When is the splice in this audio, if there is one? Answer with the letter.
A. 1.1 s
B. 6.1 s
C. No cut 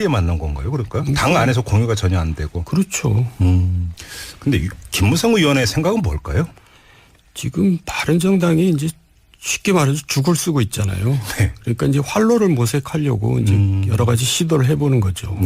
A